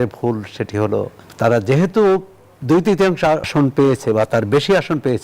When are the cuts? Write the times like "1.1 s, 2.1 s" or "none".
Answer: 1.2 s, 3.5 s